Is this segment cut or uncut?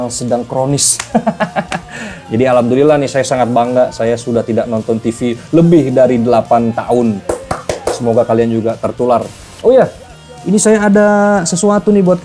cut